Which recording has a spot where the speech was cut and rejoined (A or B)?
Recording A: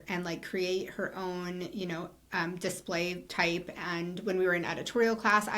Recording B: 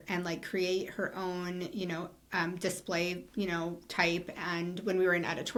A